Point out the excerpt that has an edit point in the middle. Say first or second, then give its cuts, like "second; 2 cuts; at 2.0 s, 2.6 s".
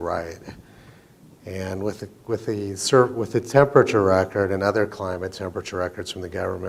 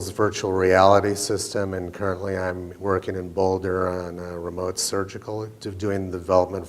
second; 1 cut; at 4.8 s